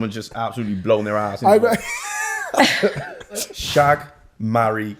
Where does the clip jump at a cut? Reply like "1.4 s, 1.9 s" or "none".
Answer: 3.5 s